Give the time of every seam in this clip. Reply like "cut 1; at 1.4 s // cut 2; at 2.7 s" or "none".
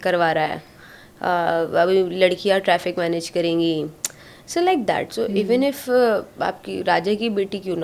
none